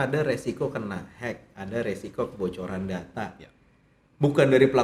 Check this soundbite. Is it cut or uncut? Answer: uncut